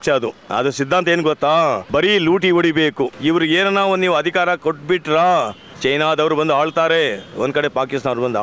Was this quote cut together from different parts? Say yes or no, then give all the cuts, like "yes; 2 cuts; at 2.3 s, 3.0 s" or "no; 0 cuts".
yes; 3 cuts; at 1.8 s, 3.1 s, 5.6 s